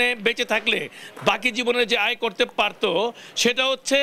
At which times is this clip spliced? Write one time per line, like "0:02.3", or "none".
none